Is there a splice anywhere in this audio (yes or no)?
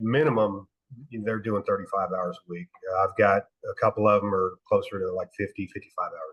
no